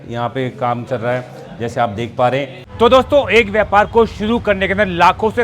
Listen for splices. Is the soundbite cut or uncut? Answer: cut